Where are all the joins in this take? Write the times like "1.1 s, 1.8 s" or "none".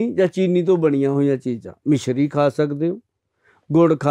none